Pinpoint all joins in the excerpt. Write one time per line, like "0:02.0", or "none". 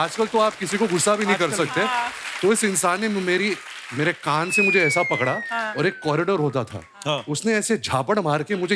none

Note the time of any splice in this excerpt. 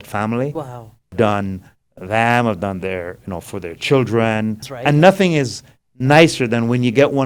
0:01.1
0:04.6

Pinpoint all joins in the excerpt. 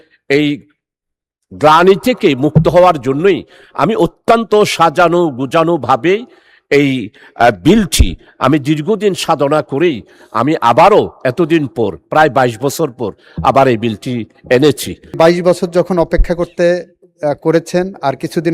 0:15.2

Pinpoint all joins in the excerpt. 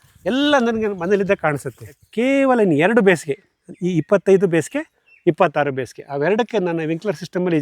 0:02.0

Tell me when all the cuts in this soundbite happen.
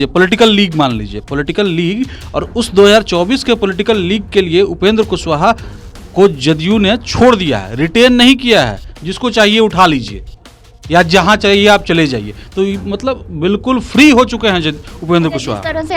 none

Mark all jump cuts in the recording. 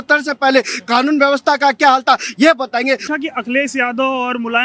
0:03.1

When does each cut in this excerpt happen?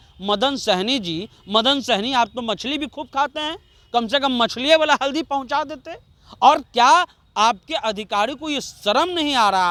none

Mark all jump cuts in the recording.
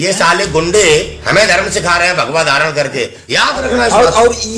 0:03.2

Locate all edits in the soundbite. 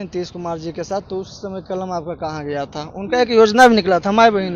none

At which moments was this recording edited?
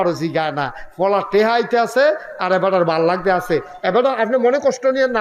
none

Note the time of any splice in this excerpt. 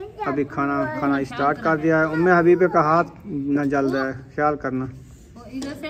none

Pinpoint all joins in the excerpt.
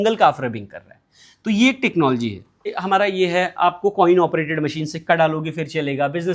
0:02.8

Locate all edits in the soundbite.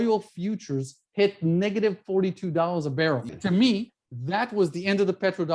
0:03.3

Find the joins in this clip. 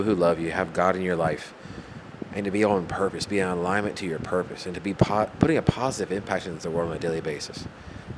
none

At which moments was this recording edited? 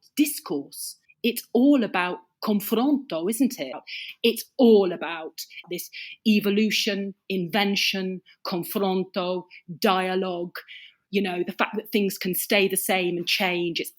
0:03.7

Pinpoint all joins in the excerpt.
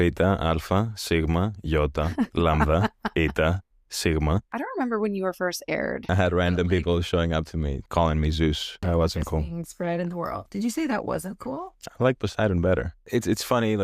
0:04.5
0:06.1
0:07.8
0:08.8
0:13.0

